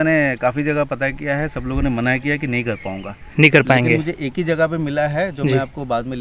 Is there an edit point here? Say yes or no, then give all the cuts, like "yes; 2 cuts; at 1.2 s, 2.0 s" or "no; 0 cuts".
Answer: no; 0 cuts